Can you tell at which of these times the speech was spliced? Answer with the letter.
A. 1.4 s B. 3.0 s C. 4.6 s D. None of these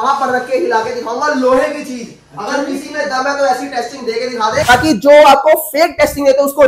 C